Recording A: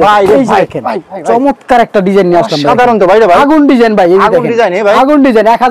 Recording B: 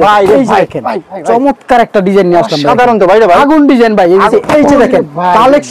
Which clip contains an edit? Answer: B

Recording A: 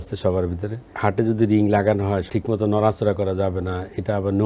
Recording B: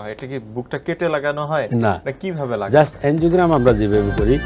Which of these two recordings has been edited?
A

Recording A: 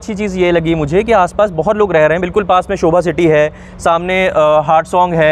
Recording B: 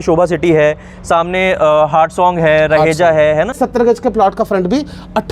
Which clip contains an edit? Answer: B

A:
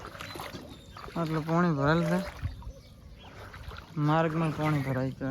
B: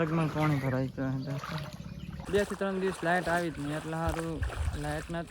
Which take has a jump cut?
B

